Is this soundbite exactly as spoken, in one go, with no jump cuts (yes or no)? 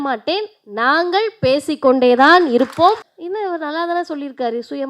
no